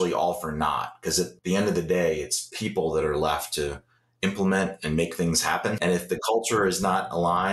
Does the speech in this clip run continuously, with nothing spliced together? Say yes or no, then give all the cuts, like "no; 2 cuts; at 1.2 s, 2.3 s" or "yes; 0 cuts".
no; 2 cuts; at 1.4 s, 5.8 s